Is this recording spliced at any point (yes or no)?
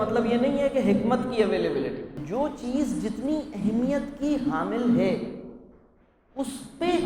yes